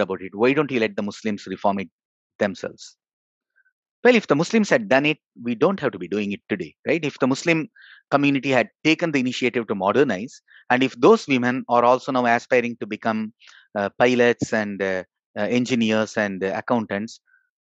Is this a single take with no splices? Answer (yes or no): yes